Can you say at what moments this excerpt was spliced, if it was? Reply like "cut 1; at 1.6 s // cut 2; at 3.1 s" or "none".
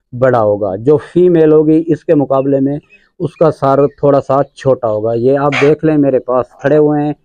none